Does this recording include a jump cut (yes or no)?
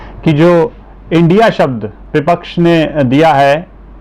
no